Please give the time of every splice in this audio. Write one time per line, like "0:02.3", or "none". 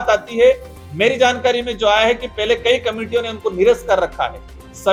none